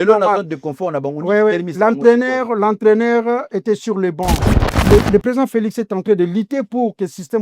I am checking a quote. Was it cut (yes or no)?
yes